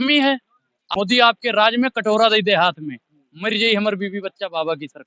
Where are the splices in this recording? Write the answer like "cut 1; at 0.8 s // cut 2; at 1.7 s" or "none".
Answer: cut 1; at 0.9 s